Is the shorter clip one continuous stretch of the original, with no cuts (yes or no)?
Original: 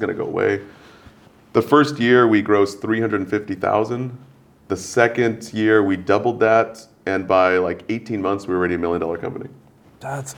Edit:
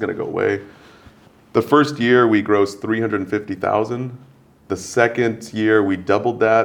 yes